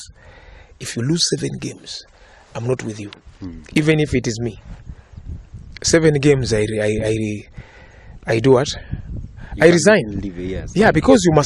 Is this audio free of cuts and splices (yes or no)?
yes